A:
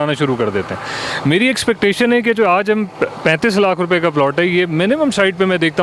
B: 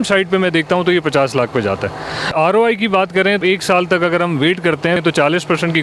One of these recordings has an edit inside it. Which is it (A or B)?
B